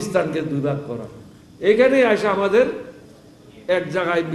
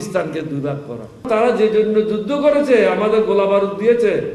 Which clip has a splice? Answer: second; 1 cut; at 1.2 s

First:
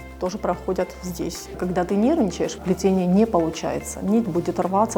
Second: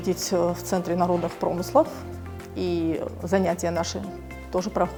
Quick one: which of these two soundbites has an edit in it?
first; 2 cuts; at 1.6 s, 2.6 s

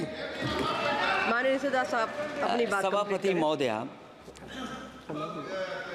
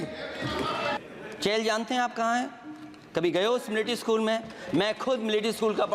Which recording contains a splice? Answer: second; 1 cut; at 1.0 s

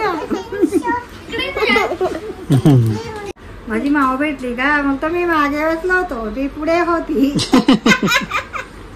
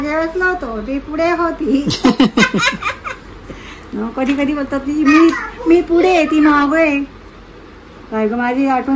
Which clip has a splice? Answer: first; 1 cut; at 3.3 s

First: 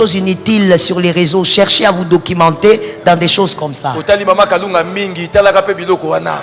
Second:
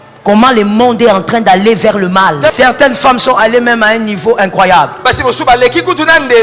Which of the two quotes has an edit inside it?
second; 1 cut; at 2.5 s

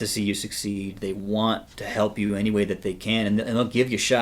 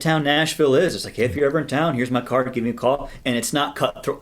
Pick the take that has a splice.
second; 1 cut; at 3.1 s

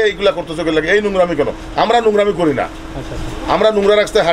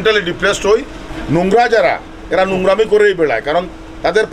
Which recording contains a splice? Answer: second; 1 cut; at 1.0 s

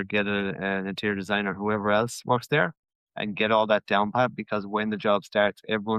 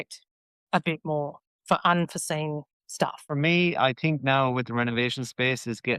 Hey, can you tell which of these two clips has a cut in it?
second; 1 cut; at 3.3 s

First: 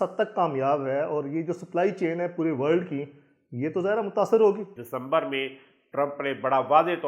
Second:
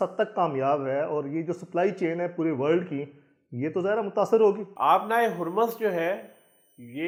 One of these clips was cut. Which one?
first; 1 cut; at 4.7 s

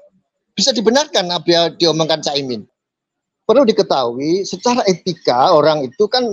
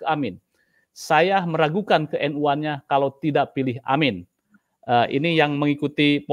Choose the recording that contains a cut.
first; 1 cut; at 3.1 s

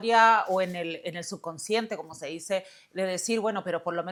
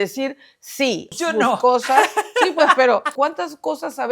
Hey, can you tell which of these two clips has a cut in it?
second; 2 cuts; at 1.1 s, 3.1 s

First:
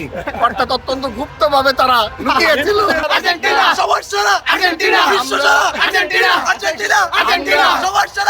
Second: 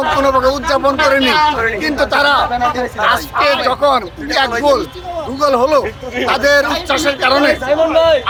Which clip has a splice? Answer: first; 1 cut; at 3.0 s

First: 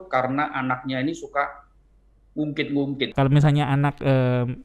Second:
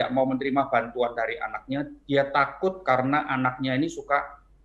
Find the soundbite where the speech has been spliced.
first; 1 cut; at 3.1 s

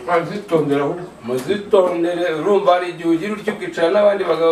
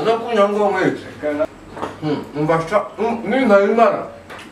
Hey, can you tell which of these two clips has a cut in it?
second; 1 cut; at 1.5 s

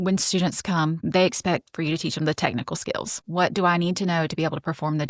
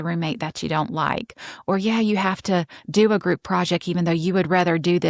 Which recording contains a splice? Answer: first; 2 cuts; at 1.0 s, 3.2 s

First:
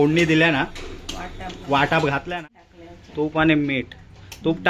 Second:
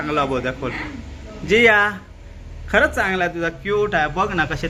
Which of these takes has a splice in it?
first; 1 cut; at 2.2 s

